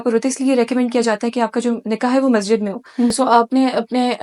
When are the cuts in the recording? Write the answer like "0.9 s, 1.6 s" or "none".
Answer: 3.1 s